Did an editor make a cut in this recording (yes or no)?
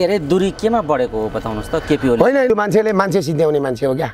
yes